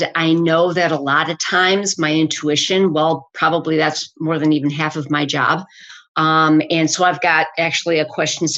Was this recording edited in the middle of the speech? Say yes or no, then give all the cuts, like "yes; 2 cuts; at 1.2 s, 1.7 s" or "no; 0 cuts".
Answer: no; 0 cuts